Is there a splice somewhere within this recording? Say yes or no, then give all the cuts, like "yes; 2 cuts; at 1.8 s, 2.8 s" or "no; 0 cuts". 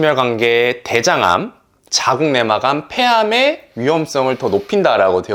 no; 0 cuts